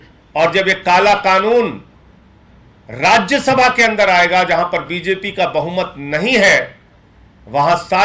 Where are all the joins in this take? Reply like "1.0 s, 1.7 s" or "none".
none